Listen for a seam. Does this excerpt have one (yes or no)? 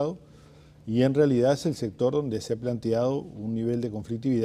no